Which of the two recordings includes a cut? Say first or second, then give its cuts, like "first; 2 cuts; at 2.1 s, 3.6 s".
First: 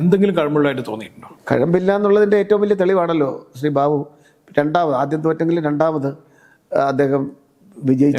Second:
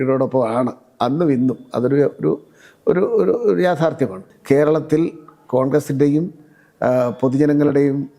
second; 1 cut; at 4.3 s